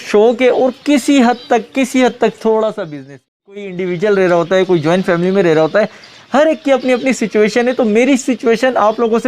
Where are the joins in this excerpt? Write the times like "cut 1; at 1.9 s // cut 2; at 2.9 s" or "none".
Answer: cut 1; at 3.8 s